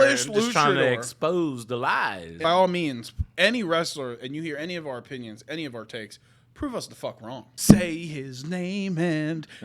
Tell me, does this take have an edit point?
yes; 2 cuts; at 2.4 s, 7.5 s

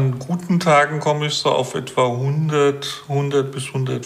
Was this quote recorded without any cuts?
yes; 0 cuts

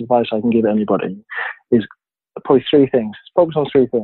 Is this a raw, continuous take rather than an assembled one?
yes; 0 cuts

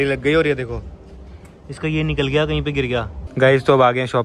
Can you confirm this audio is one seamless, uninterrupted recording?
no; 1 cut; at 3.2 s

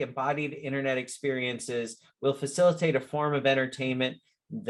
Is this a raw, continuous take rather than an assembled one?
yes; 0 cuts

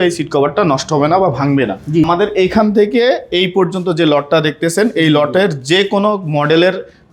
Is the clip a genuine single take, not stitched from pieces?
no; 1 cut; at 2.0 s

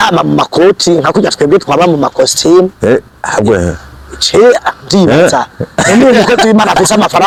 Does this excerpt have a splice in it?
no; 0 cuts

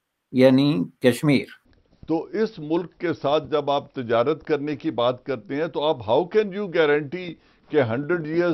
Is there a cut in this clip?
yes; 1 cut; at 1.6 s

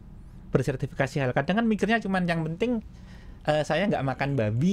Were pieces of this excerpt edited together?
no; 0 cuts

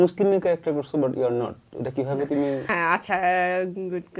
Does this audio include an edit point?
no; 0 cuts

